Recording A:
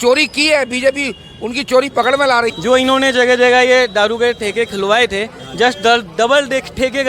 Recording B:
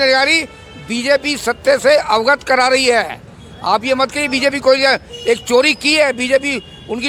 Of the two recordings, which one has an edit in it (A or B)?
A